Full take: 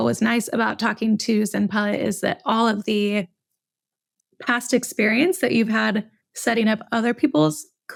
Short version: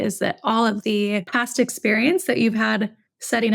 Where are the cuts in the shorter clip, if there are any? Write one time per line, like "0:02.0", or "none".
0:01.3